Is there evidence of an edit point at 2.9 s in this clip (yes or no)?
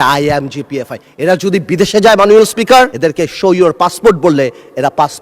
yes